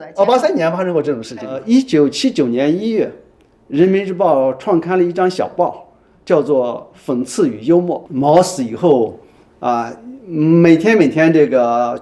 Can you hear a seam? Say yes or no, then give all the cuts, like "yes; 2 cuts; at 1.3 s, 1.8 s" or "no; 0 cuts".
yes; 2 cuts; at 1.6 s, 8.1 s